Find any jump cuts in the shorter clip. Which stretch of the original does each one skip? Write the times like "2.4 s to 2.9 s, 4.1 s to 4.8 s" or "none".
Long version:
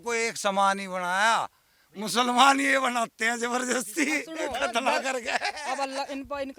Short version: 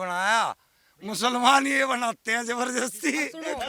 none